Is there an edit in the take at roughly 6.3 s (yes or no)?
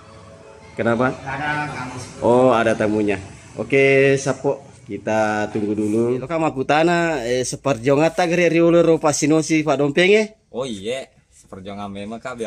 yes